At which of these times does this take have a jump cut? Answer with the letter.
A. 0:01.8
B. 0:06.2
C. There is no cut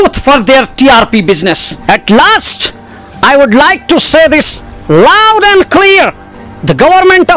A